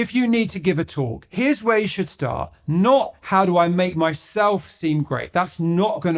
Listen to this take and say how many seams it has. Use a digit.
1